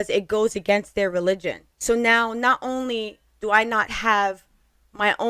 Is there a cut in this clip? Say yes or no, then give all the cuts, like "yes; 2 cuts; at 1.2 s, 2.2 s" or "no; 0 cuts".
no; 0 cuts